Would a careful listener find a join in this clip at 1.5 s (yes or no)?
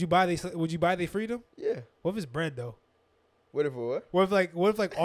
yes